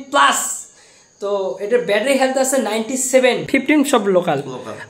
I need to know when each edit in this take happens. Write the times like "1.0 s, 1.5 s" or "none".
3.5 s